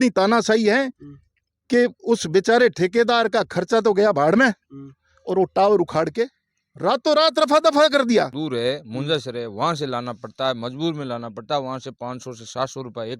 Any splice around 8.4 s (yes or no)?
yes